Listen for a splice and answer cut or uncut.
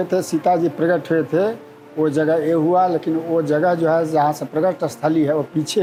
uncut